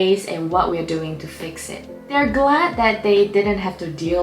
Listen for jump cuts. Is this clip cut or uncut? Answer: cut